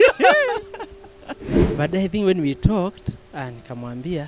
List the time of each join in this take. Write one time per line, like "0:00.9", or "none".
0:01.7